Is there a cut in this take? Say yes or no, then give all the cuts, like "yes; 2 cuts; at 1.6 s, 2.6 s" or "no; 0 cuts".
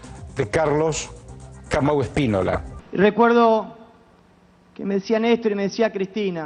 no; 0 cuts